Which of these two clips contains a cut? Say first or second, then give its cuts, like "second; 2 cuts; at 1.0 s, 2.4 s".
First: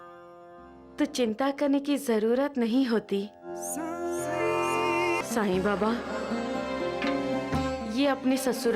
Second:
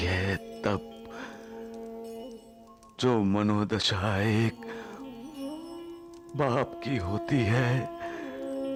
first; 1 cut; at 5.2 s